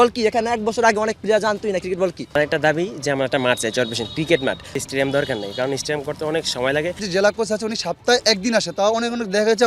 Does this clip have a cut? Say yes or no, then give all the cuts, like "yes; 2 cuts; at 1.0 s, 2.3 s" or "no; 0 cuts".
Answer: yes; 3 cuts; at 2.3 s, 4.8 s, 7.0 s